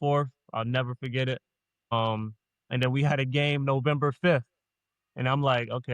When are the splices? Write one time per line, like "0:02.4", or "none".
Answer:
none